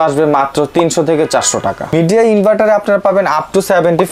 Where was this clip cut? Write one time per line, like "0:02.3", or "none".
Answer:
0:01.9